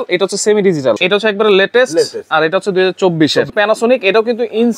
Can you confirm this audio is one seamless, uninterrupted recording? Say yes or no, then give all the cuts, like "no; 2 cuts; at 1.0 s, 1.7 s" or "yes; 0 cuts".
no; 2 cuts; at 1.0 s, 3.5 s